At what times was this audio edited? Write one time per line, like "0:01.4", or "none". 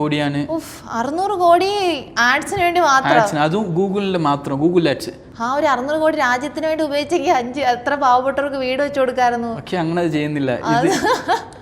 none